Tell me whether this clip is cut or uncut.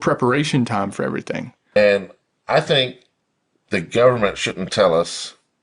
cut